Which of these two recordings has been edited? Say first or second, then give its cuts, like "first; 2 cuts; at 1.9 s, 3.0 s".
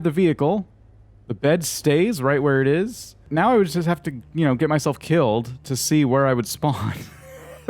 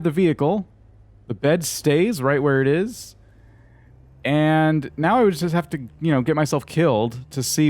first; 1 cut; at 3.2 s